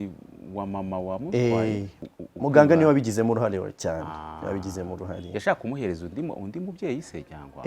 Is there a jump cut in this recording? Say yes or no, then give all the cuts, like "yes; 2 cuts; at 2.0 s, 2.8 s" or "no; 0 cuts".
yes; 1 cut; at 1.9 s